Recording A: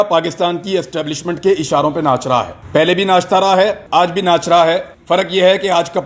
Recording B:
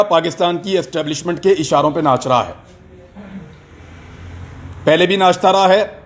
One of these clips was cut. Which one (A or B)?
A